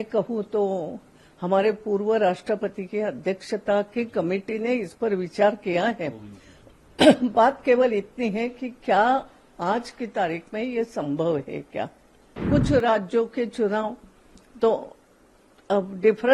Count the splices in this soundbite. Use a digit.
1